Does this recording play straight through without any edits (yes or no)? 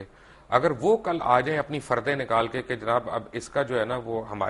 yes